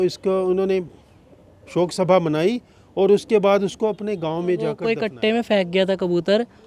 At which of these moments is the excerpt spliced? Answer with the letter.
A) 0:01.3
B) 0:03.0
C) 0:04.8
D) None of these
C